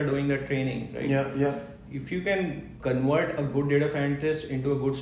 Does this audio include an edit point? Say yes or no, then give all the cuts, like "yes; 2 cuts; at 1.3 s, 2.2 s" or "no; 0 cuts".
yes; 1 cut; at 2.7 s